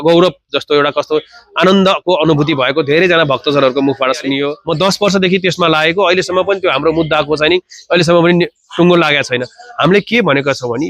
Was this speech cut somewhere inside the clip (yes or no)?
yes